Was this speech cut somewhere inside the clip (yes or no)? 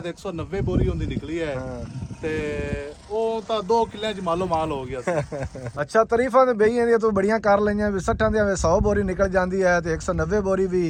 no